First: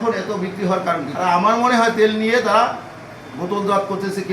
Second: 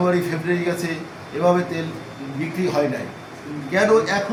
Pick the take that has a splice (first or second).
first